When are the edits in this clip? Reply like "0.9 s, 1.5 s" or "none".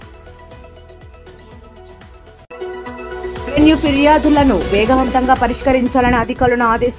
2.5 s